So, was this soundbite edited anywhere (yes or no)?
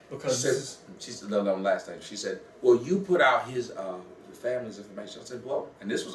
yes